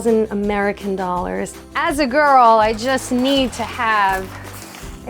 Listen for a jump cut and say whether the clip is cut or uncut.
cut